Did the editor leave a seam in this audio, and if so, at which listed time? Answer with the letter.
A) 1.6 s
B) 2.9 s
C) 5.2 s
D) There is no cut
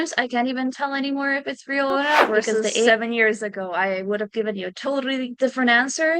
B